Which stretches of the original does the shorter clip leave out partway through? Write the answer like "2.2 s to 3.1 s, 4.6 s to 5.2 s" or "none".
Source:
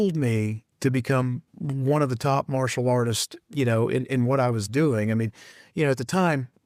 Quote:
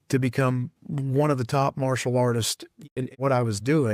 3.6 s to 3.9 s